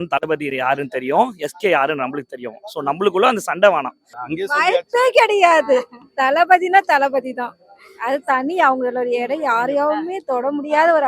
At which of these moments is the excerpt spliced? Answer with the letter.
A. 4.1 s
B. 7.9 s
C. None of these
A